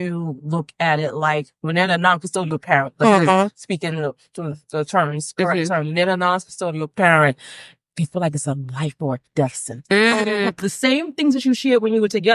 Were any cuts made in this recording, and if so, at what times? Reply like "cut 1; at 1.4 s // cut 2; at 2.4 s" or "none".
cut 1; at 1.6 s // cut 2; at 10.5 s